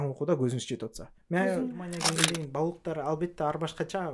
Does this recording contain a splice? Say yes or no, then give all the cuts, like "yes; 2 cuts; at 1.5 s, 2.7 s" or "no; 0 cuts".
yes; 1 cut; at 2.0 s